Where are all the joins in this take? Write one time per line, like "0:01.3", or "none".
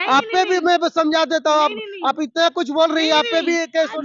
none